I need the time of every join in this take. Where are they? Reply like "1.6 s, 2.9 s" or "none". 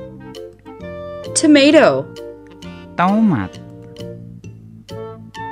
1.4 s, 2.8 s, 4.0 s